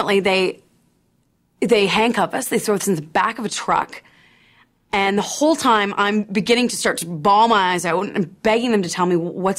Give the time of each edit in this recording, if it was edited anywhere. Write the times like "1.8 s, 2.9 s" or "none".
none